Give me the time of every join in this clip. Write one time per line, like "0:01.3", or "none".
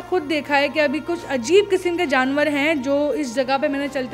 none

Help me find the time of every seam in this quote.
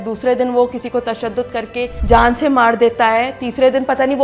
0:02.0

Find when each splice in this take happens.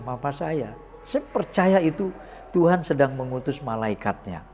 none

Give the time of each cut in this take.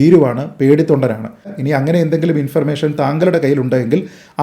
0:01.4

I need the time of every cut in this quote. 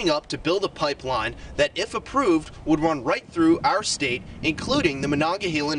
none

